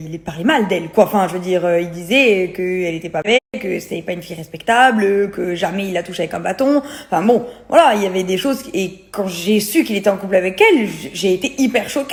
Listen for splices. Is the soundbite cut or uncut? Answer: uncut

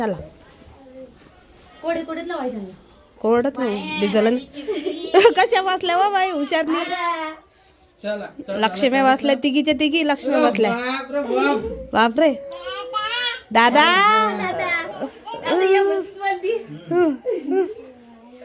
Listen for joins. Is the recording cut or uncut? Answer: uncut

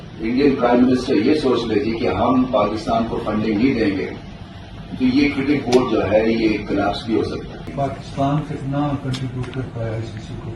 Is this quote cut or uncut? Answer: cut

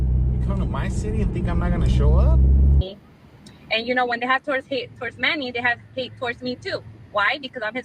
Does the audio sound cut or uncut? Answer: cut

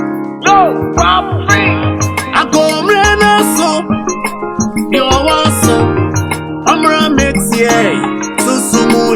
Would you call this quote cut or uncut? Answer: uncut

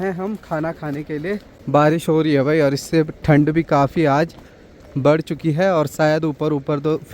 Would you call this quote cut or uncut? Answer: cut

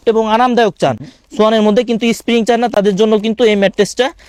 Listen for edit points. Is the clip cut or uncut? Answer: uncut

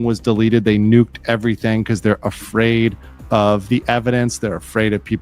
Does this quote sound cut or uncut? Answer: uncut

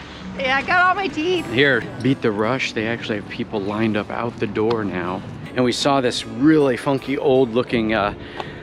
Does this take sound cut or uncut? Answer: cut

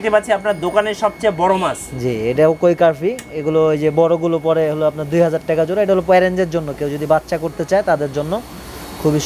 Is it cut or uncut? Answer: uncut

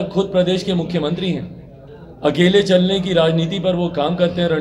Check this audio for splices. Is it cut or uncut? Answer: uncut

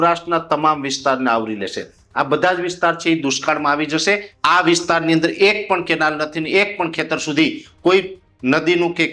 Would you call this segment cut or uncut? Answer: cut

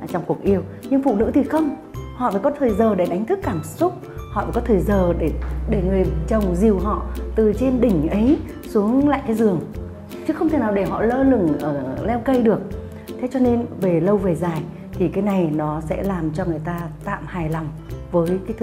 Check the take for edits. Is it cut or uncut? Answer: uncut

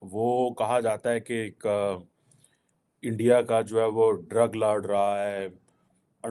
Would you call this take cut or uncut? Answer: uncut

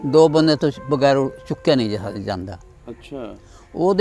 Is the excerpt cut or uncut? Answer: uncut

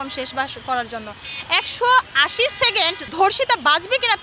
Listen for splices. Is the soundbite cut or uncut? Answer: uncut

